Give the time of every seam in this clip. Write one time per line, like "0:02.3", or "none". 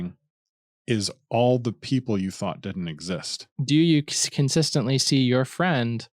0:03.5